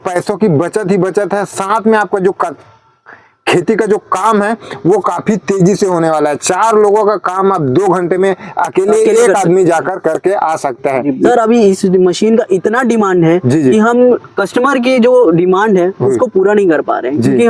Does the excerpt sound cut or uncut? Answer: uncut